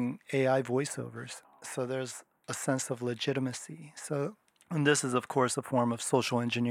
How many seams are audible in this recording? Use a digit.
2